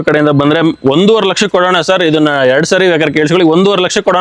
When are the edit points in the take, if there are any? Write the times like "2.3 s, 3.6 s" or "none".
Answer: none